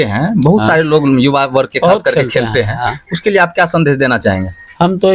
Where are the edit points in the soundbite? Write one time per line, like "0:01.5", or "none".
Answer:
none

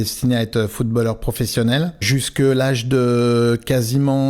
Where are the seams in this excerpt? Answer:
0:02.1

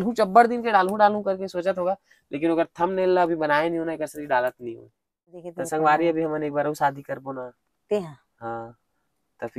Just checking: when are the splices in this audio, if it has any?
0:05.4

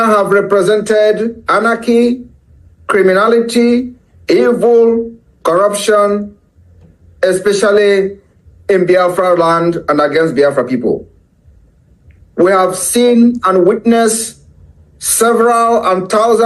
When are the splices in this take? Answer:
none

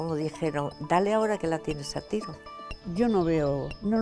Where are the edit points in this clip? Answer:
0:02.5

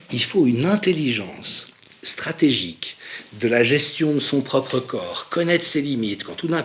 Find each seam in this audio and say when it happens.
none

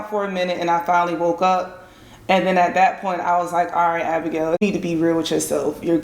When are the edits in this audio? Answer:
0:04.6

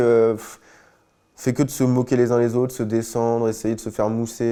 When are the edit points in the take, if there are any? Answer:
none

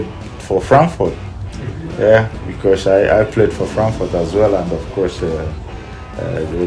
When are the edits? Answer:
none

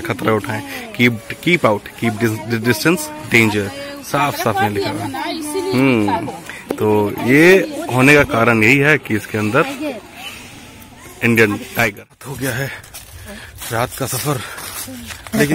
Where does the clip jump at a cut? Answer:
0:11.9

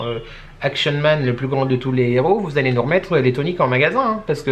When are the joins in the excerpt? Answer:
none

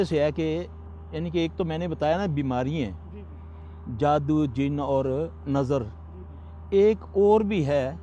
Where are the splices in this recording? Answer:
0:01.7

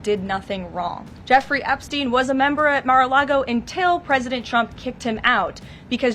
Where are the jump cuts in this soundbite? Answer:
0:01.1

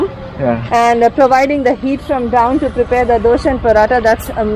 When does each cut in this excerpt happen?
none

